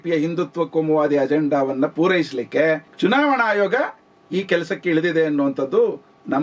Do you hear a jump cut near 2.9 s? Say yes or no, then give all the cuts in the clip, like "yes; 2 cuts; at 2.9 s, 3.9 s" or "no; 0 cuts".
yes; 1 cut; at 2.9 s